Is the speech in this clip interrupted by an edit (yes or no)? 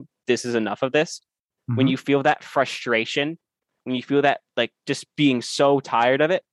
no